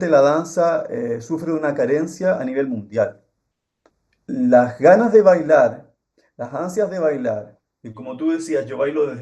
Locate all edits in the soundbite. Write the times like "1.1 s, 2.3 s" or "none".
3.9 s